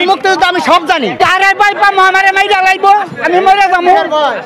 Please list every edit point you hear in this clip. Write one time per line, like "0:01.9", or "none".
0:01.2